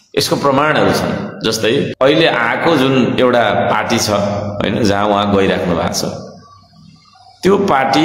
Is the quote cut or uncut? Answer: cut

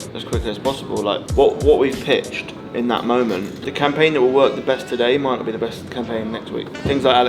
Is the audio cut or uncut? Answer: uncut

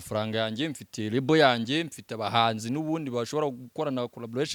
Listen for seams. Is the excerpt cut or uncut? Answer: uncut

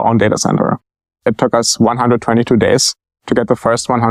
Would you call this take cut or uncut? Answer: cut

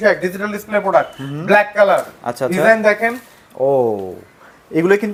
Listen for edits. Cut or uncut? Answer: uncut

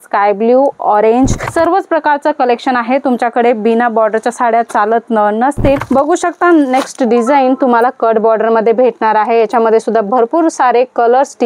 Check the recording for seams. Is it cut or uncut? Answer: cut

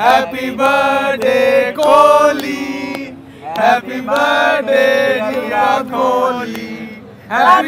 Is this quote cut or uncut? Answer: uncut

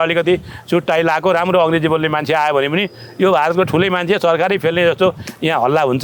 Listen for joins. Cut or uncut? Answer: uncut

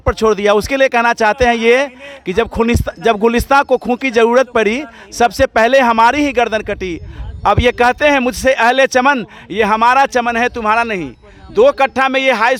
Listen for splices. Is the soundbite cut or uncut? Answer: uncut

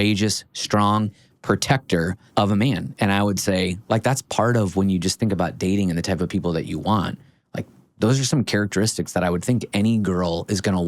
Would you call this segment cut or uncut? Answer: uncut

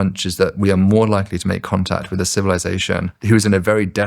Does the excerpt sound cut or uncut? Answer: cut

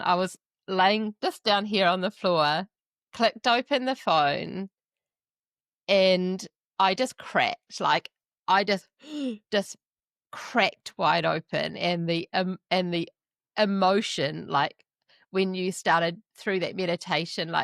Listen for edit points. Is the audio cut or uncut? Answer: uncut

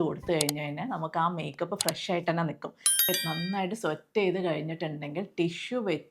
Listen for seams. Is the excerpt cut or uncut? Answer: cut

